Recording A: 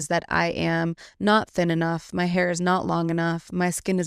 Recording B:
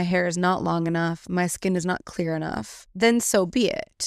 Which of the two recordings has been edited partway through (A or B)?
B